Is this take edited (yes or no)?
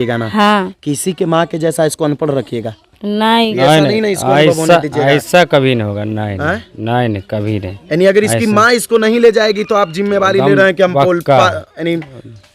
yes